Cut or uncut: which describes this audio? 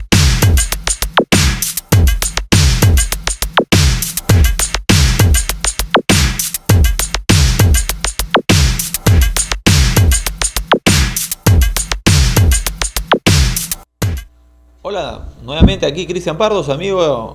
uncut